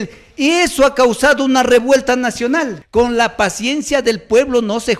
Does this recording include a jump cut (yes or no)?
yes